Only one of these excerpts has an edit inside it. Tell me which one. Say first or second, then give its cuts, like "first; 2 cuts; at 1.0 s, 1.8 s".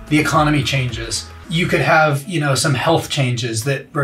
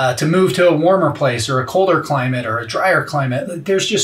first; 1 cut; at 1.4 s